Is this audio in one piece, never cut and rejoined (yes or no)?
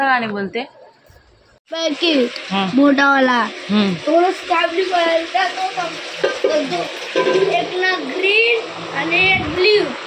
no